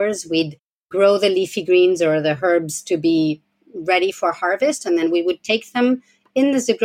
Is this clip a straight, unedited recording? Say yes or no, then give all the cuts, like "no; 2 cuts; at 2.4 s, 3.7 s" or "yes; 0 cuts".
yes; 0 cuts